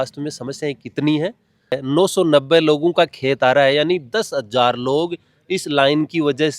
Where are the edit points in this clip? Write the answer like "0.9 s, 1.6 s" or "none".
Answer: 1.8 s